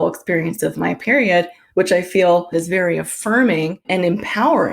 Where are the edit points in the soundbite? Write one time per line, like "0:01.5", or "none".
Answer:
0:01.6
0:02.5
0:03.8

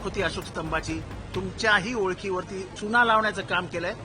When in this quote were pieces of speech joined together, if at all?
0:02.7

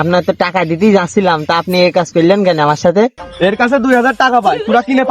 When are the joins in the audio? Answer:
0:03.2

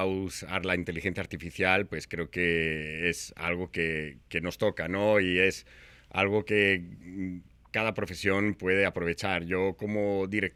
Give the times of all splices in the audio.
none

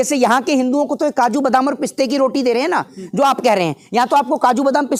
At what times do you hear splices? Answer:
none

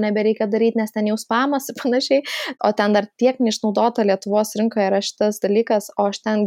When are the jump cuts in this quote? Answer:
0:02.5

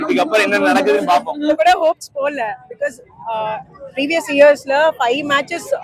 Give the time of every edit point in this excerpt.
none

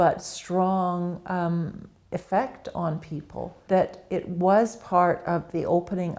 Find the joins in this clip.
0:03.6

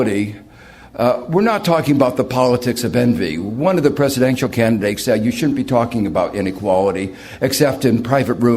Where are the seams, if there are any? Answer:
0:03.1

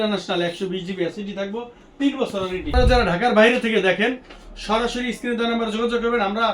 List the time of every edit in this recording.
0:02.7

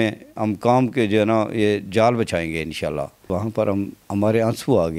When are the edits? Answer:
0:03.2

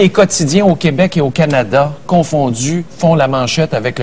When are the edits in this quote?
0:01.5

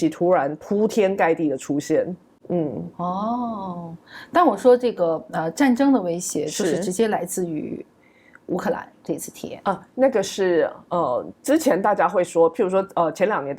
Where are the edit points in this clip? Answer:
none

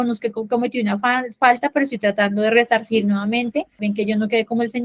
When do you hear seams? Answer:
0:03.8

